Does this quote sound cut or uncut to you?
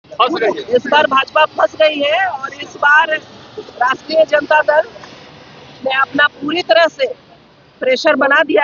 uncut